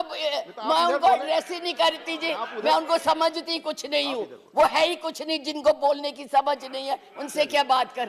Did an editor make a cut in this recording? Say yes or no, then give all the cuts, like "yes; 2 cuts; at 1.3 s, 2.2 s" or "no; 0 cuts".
no; 0 cuts